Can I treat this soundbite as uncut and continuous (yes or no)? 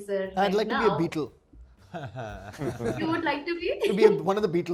yes